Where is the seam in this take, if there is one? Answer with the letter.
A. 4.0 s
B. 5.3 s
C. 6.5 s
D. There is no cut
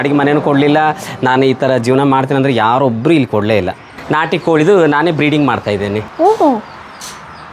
A